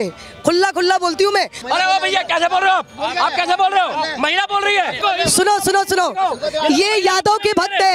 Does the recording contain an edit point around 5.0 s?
yes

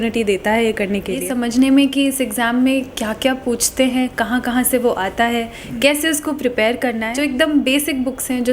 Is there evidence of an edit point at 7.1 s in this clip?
yes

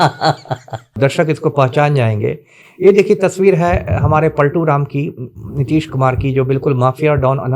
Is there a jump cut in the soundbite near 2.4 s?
no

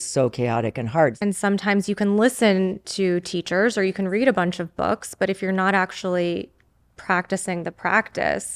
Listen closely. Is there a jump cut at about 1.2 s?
yes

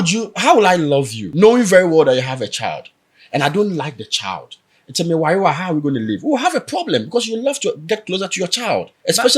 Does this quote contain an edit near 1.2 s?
yes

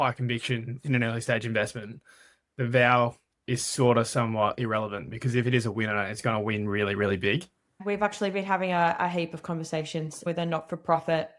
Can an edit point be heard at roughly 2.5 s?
no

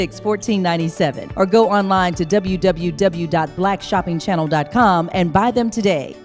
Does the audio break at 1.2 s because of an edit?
yes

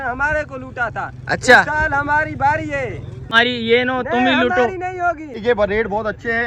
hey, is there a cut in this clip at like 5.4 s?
yes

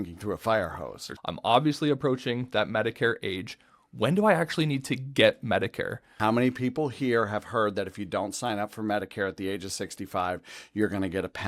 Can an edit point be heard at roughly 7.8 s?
no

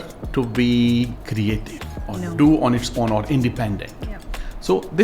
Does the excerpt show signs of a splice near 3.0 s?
no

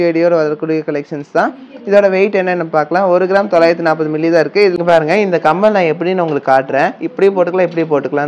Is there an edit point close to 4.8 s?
yes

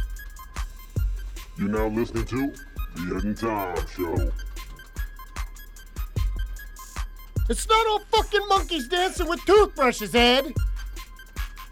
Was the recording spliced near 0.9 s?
yes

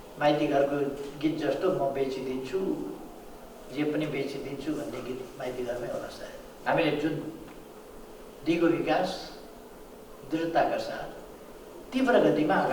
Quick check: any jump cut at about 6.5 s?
yes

